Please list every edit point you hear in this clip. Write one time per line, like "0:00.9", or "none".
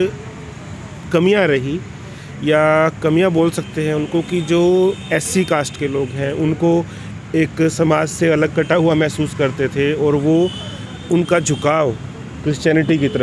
none